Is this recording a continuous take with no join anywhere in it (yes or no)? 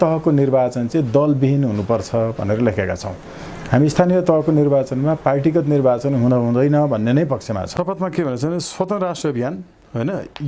no